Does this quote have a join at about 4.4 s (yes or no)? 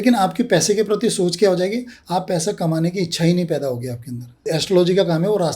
yes